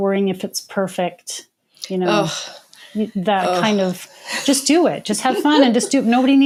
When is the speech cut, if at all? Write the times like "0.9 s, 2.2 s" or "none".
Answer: none